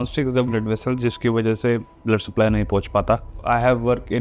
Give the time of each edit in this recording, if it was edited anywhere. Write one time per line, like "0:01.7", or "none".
0:03.3

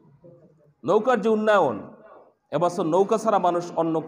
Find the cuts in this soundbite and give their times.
none

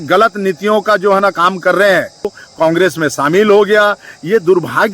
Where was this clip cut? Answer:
0:02.4

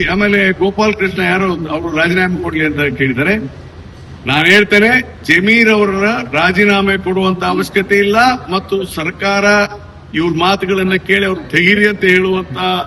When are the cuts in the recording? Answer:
none

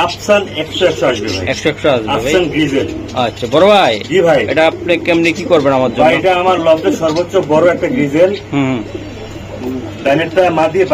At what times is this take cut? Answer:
none

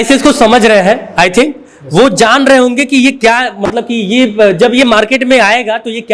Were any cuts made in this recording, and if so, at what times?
none

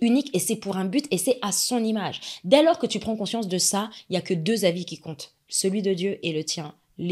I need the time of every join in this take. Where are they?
none

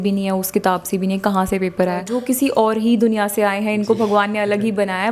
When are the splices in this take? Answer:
0:02.1

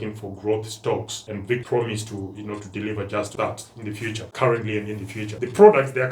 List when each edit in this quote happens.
0:01.6

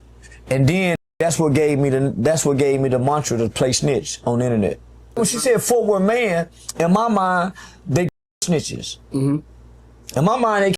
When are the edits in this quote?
0:05.2

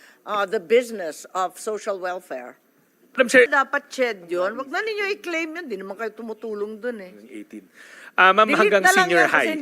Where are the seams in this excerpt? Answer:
0:03.5

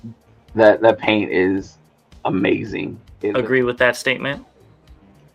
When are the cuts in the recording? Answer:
0:03.0

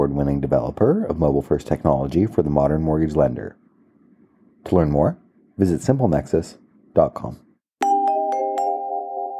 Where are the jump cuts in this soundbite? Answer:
0:07.5

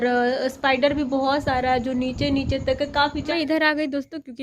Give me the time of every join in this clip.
0:03.3

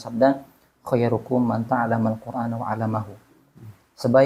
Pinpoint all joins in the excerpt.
none

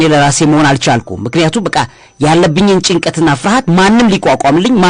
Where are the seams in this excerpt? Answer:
none

